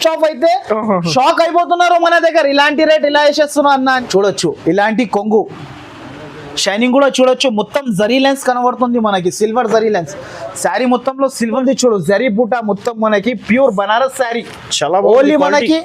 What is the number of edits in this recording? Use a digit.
2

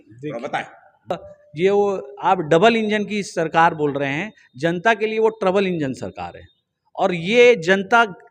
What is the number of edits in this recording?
1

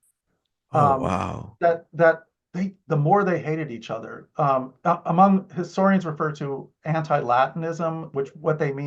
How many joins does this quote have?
0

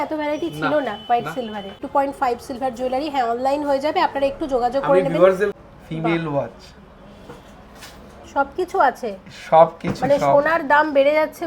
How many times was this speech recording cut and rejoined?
2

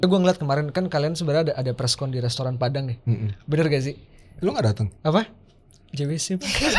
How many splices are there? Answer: 0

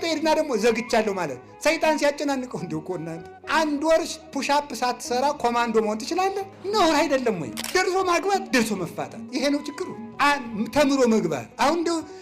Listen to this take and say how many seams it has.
1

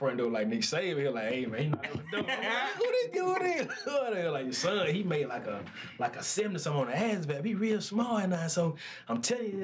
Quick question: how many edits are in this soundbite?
0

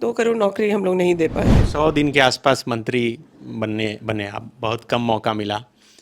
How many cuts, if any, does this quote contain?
1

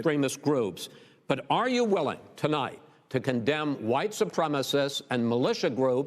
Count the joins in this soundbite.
1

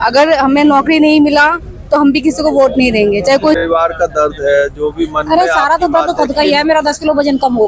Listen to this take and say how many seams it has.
1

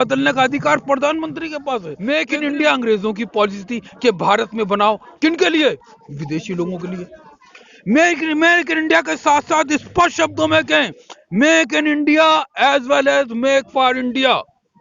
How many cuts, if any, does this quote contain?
1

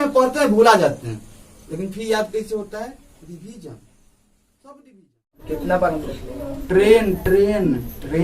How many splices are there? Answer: 1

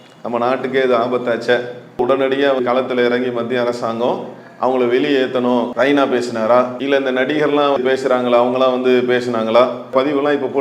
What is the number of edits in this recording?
4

